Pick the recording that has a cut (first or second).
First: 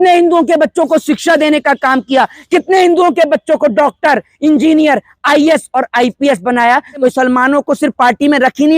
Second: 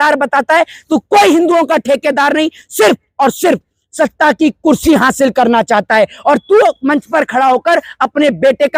first